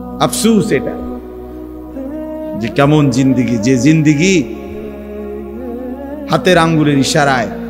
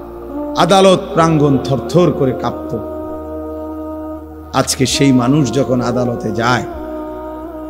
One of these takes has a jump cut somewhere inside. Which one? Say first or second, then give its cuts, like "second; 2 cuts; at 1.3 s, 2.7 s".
first; 4 cuts; at 0.9 s, 2.7 s, 4.5 s, 5.9 s